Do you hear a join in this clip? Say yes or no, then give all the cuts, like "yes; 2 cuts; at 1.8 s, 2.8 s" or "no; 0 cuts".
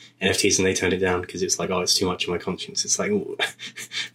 no; 0 cuts